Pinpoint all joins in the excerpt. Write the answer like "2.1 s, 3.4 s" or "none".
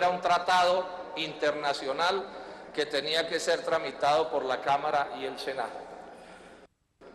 5.5 s